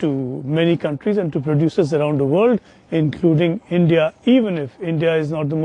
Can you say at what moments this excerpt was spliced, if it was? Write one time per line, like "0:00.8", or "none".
none